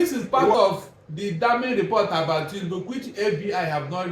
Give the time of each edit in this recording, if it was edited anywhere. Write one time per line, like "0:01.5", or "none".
none